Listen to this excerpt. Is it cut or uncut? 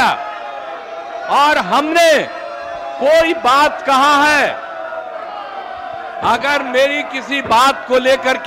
uncut